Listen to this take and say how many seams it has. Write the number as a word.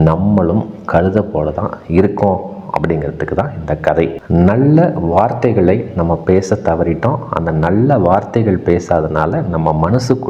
one